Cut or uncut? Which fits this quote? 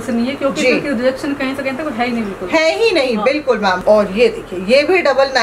cut